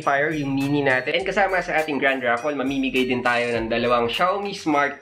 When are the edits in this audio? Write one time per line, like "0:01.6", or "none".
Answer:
0:01.1